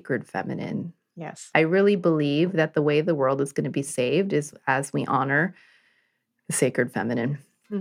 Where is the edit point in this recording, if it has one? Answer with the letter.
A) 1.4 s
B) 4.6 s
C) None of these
A